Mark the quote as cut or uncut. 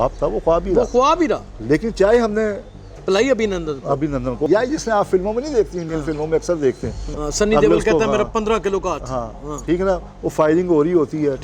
cut